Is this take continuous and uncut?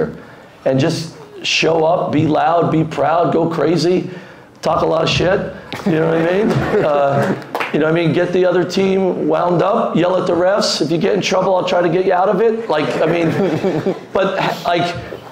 yes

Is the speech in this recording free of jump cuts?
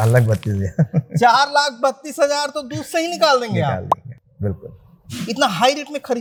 yes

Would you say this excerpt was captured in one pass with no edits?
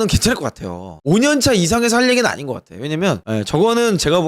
no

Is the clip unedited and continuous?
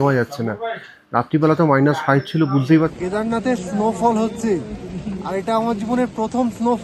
no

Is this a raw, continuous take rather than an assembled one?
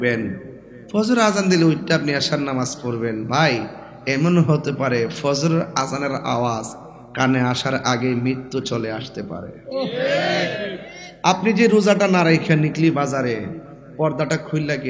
yes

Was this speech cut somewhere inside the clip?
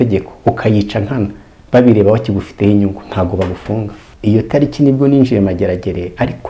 yes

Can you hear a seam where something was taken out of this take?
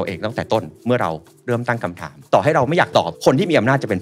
yes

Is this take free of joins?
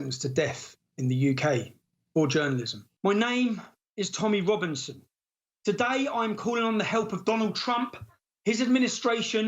no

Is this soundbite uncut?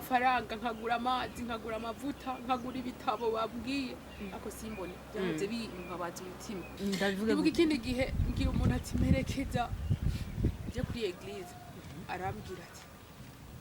no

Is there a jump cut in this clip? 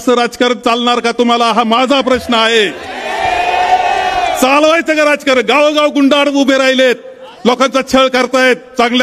no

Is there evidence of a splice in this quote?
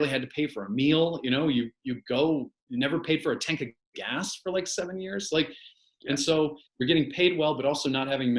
no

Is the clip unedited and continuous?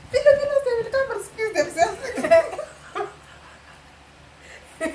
yes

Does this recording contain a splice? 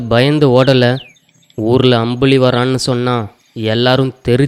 no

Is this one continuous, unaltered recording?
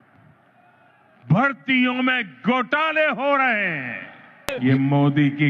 no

